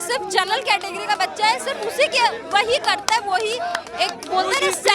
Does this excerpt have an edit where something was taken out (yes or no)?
no